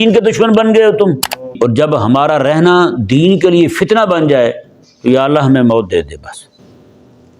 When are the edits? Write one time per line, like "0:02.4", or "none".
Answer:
0:01.5